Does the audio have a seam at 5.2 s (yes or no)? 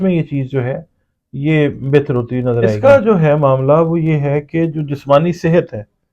no